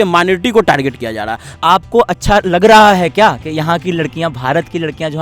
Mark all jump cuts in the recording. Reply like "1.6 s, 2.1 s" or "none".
1.4 s